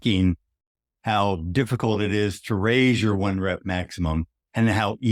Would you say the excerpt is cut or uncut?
uncut